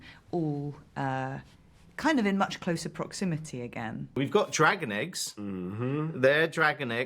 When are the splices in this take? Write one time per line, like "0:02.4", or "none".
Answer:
0:04.2